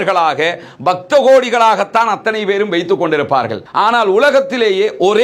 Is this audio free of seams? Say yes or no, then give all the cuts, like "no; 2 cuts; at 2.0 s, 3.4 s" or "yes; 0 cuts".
no; 1 cut; at 3.7 s